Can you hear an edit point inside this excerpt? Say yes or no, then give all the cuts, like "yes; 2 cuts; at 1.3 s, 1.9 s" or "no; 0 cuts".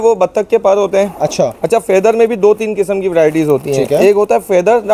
no; 0 cuts